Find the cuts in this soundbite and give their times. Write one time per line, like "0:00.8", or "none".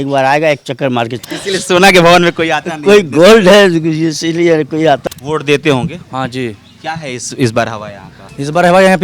0:01.2
0:05.0